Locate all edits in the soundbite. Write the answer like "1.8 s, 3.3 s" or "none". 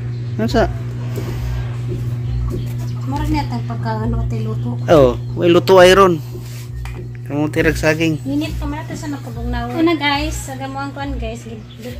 9.7 s